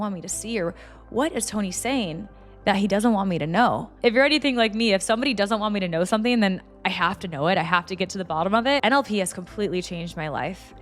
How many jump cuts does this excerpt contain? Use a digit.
1